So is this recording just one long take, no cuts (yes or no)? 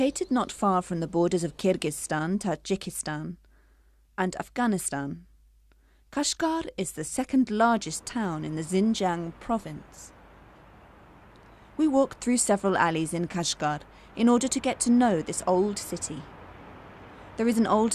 no